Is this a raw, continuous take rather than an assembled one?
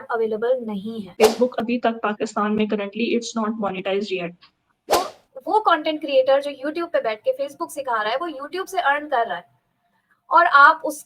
no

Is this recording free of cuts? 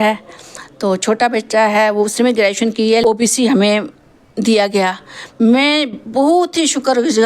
no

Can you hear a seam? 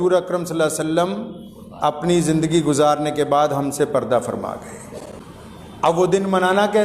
yes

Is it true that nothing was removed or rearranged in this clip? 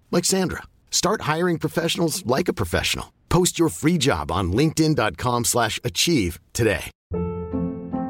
no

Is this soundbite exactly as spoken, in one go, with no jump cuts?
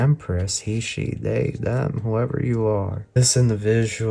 no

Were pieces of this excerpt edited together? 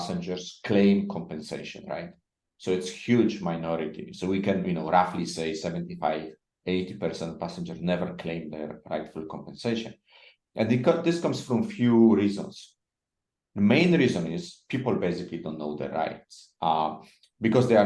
no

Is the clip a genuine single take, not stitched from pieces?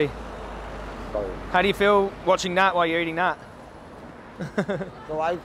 yes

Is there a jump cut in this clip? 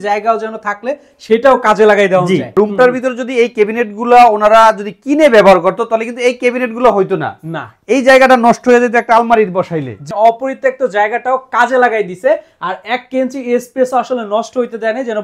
yes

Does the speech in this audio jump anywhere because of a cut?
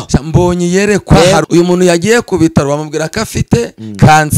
yes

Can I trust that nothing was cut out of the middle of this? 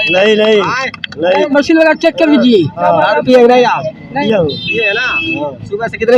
no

